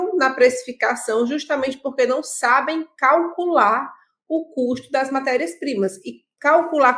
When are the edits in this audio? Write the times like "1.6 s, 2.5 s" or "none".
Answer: none